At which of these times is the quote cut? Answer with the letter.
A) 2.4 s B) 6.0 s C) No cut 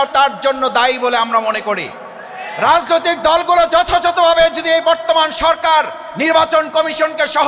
C